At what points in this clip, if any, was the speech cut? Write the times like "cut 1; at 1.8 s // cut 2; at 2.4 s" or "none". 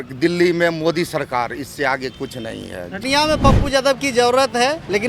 cut 1; at 3.0 s